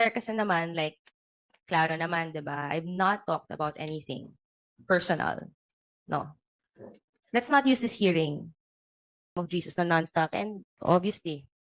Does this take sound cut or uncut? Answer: cut